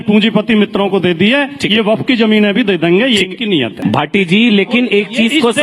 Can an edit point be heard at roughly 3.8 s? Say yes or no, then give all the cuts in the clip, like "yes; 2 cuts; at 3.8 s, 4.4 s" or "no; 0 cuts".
yes; 1 cut; at 3.8 s